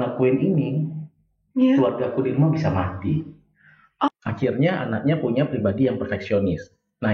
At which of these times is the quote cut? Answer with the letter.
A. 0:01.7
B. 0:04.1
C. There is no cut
B